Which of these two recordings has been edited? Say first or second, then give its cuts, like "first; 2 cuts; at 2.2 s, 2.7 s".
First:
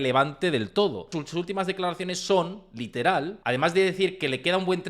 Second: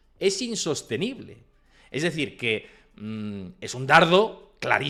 first; 2 cuts; at 1.1 s, 3.4 s